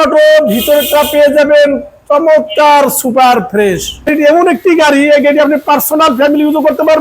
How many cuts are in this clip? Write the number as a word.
one